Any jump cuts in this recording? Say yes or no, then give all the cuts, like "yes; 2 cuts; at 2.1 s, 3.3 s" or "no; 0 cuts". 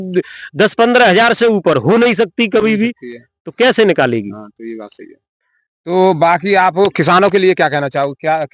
no; 0 cuts